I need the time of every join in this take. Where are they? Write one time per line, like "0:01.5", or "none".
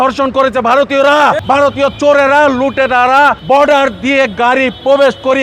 0:01.4
0:03.4